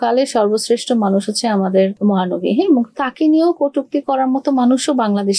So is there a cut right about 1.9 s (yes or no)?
yes